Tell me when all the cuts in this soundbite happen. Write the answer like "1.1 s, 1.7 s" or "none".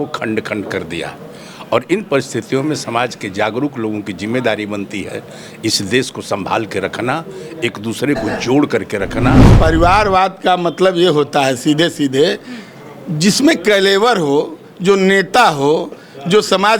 9.5 s